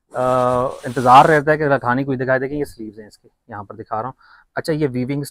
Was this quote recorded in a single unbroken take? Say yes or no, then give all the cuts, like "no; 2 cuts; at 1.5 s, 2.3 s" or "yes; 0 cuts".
yes; 0 cuts